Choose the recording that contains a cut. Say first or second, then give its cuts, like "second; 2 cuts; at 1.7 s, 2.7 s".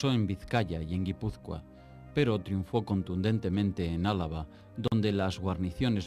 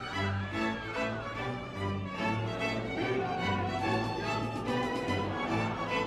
first; 1 cut; at 2.4 s